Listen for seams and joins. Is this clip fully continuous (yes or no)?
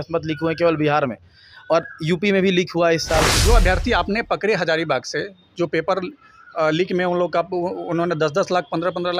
no